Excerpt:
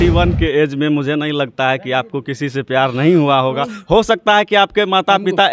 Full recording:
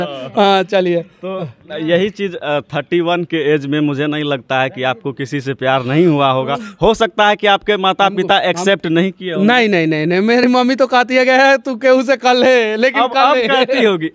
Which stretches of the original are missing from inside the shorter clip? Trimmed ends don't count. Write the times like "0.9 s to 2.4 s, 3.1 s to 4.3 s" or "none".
none